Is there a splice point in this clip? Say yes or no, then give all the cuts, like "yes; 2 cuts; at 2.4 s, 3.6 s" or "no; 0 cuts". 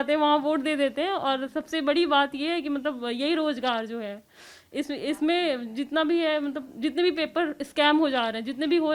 no; 0 cuts